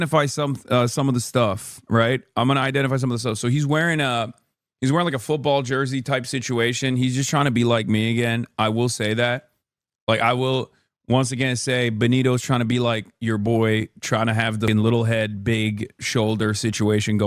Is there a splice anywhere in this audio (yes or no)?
no